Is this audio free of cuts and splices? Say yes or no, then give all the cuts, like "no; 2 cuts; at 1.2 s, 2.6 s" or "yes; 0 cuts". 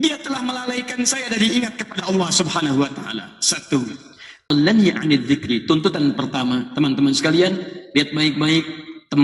no; 1 cut; at 4.5 s